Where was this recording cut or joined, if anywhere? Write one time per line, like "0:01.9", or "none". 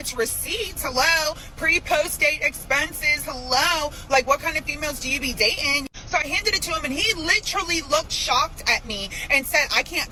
none

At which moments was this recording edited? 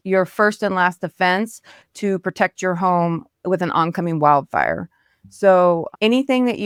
none

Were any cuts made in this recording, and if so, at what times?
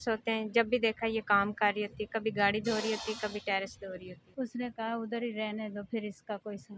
0:04.2

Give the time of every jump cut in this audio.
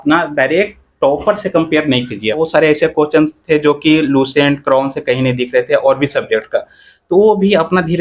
0:02.4

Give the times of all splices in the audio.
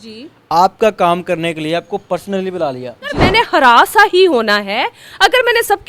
0:03.2

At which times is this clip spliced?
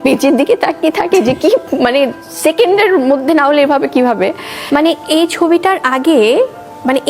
0:04.5

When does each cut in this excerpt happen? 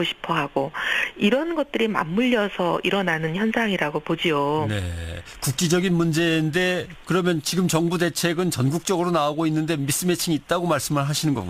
0:02.3

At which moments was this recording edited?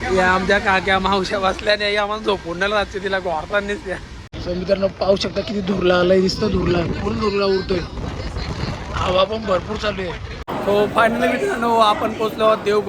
0:04.3
0:10.3

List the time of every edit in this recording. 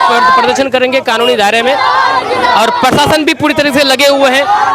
none

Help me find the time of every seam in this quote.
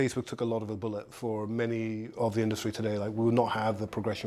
none

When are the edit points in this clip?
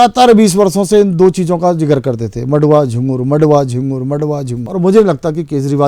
0:04.6

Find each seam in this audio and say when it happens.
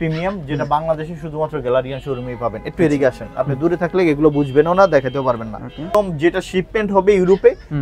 0:05.9

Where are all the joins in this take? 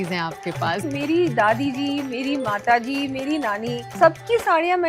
0:00.8
0:03.9

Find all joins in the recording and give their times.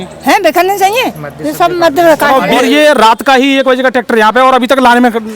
0:02.6

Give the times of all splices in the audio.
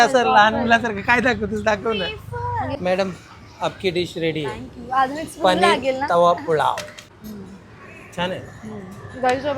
0:02.7
0:07.1

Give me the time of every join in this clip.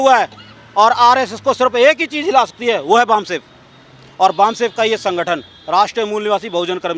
none

